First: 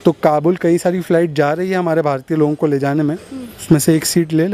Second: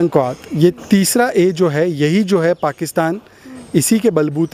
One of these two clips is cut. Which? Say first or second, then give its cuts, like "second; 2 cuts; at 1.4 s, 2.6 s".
first; 1 cut; at 3.6 s